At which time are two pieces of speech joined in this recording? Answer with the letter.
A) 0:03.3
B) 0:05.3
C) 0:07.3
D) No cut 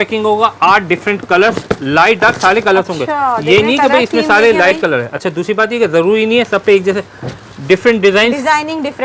D